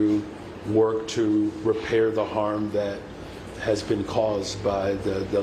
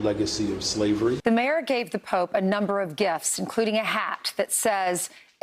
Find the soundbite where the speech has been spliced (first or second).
second